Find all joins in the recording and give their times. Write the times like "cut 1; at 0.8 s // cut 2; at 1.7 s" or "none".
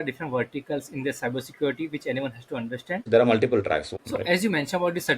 cut 1; at 3.0 s // cut 2; at 3.9 s